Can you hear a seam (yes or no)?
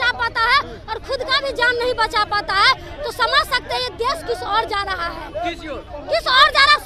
no